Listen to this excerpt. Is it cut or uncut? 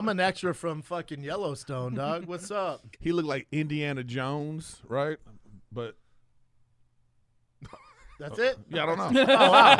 uncut